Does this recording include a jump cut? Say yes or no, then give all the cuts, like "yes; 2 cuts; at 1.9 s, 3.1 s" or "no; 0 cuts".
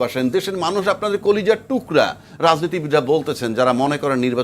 no; 0 cuts